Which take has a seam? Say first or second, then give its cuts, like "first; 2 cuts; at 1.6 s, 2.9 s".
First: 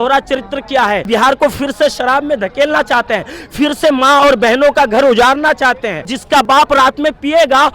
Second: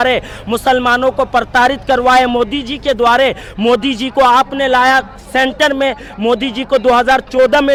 first; 2 cuts; at 1.0 s, 6.2 s